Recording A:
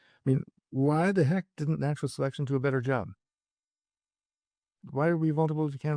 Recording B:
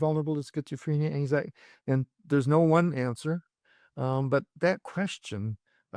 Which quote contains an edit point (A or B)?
A